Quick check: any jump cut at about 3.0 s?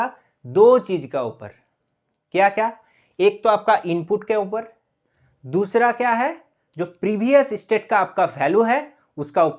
no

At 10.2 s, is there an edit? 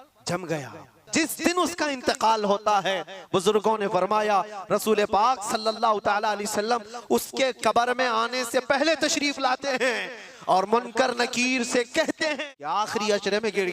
no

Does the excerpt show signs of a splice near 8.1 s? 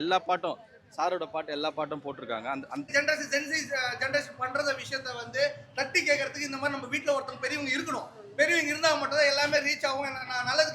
no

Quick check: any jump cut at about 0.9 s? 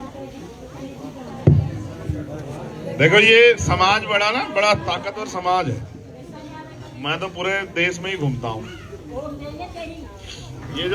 no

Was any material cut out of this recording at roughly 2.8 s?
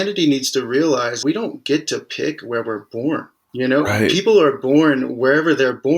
no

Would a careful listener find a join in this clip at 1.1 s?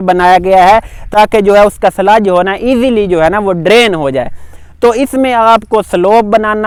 no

